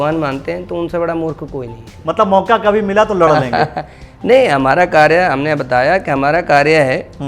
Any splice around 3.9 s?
no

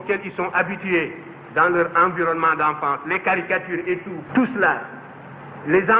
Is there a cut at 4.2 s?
yes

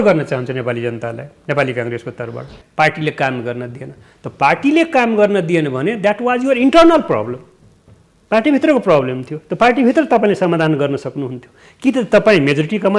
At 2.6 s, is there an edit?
yes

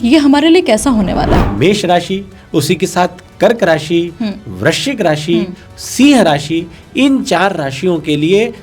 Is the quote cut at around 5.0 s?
no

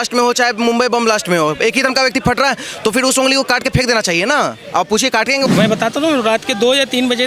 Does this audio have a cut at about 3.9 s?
no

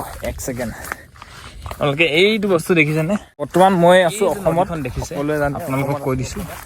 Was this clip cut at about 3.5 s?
yes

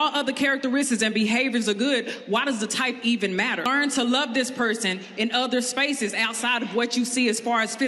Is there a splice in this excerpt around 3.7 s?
yes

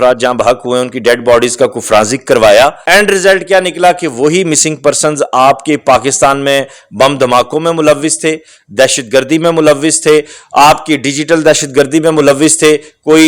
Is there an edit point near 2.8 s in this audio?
yes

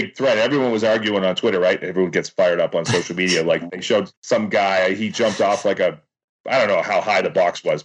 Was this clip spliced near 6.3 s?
yes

